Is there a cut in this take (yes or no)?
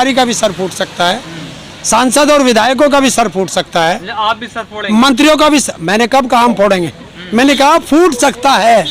no